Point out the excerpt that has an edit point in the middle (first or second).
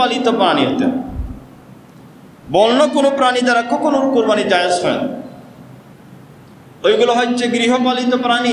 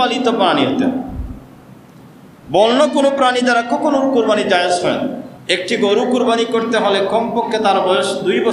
second